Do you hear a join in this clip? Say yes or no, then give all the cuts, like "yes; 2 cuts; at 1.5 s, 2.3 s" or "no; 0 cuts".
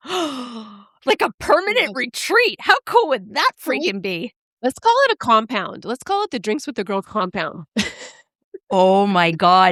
no; 0 cuts